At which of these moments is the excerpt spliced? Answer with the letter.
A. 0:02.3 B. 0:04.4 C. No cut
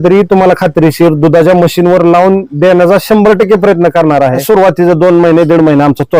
B